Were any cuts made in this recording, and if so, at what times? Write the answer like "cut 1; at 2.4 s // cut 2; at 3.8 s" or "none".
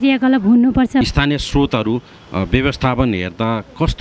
cut 1; at 1.0 s